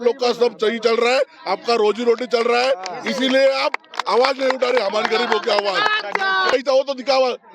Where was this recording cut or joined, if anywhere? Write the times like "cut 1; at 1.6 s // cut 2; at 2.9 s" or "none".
cut 1; at 6.5 s